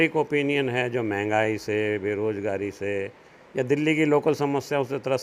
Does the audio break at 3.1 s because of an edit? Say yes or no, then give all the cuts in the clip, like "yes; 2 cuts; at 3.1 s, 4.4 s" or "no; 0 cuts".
no; 0 cuts